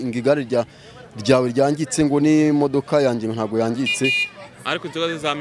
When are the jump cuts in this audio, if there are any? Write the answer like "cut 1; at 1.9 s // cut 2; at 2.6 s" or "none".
none